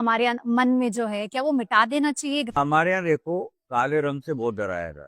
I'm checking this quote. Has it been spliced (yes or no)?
yes